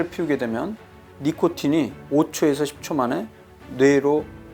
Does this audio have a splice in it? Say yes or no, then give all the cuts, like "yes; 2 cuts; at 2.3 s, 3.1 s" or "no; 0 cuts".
no; 0 cuts